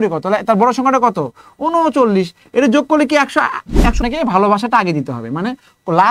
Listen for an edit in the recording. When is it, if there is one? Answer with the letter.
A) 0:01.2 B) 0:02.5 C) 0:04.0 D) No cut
C